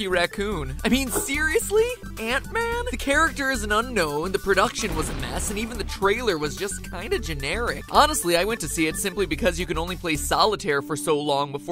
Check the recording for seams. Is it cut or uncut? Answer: cut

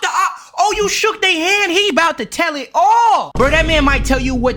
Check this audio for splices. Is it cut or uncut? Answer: cut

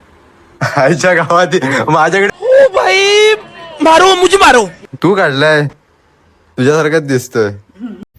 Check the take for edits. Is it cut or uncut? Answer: cut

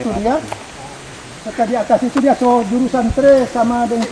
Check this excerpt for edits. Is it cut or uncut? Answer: uncut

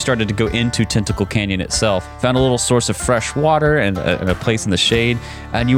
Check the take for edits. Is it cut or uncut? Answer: cut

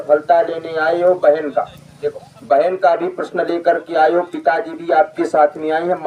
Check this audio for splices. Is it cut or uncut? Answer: uncut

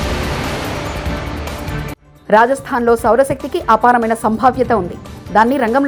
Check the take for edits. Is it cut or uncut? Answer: uncut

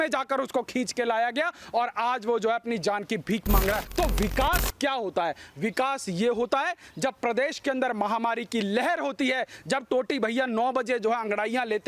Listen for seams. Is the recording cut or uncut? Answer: cut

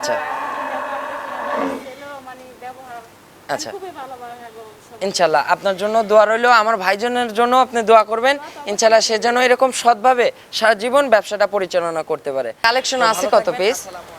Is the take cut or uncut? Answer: cut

